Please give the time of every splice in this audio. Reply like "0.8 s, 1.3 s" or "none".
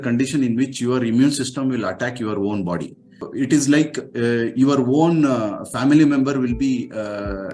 3.2 s